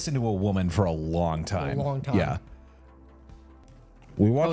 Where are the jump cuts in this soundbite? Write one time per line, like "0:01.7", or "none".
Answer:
0:03.6